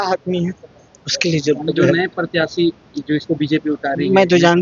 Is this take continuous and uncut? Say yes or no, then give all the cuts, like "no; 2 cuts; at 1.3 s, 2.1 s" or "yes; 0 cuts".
yes; 0 cuts